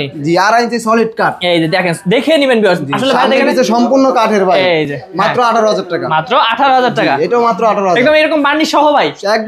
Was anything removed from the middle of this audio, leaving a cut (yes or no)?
no